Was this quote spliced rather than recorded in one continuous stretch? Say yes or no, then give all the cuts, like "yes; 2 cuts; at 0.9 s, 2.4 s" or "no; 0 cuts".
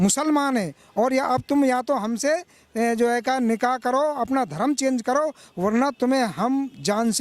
no; 0 cuts